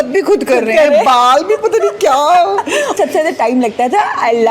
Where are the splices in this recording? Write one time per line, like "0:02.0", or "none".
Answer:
0:03.0